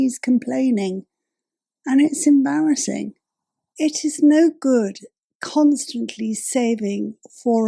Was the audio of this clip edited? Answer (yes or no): yes